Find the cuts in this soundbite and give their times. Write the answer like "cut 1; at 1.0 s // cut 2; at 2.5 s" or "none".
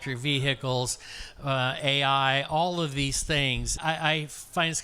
cut 1; at 3.8 s